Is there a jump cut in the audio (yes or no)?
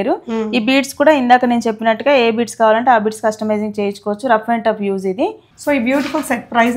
no